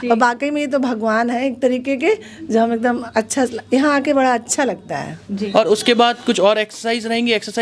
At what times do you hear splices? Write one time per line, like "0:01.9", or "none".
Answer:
0:05.5